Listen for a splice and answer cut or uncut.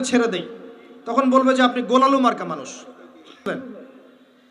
cut